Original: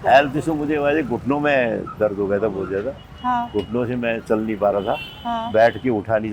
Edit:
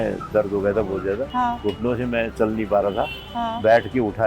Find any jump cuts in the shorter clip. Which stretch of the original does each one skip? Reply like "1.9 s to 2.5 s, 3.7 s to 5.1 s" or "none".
2.9 s to 3.2 s